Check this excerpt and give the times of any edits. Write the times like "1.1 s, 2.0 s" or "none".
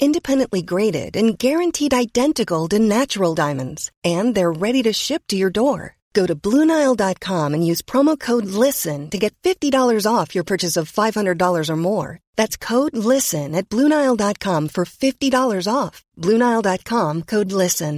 none